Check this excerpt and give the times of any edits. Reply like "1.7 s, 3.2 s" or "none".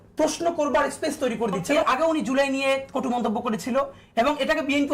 1.8 s

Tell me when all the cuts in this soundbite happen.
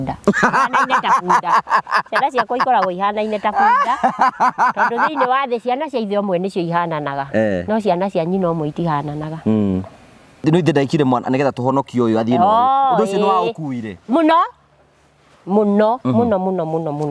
10.4 s

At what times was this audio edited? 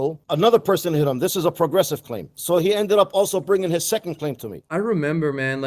4.6 s

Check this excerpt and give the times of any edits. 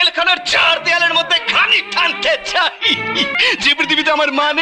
3.3 s

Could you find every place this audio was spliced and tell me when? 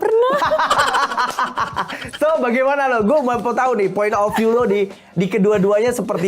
none

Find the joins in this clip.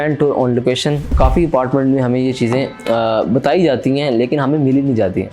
1.1 s

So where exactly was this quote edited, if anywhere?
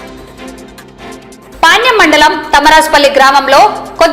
1.3 s

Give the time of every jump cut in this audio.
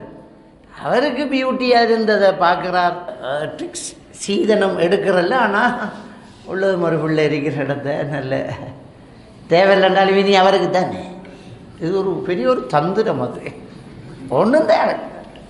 3.1 s

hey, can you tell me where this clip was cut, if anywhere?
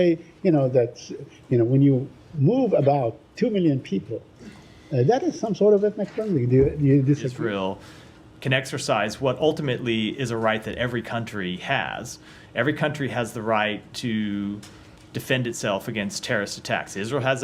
7.3 s

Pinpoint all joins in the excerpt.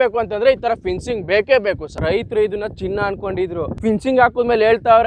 1.9 s, 3.7 s

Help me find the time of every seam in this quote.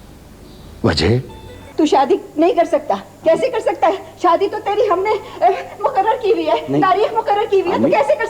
1.5 s

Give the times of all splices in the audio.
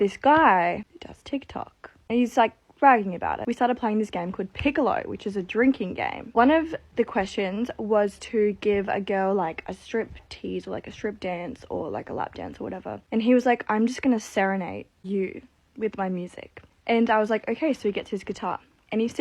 3.4 s

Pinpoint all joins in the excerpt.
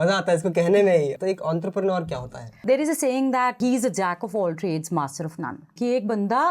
1.2 s, 2.6 s, 3.6 s, 5.7 s

